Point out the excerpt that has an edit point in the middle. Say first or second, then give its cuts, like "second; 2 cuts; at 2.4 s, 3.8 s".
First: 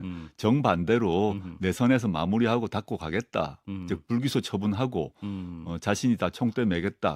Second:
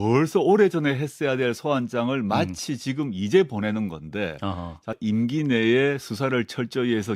second; 1 cut; at 5.0 s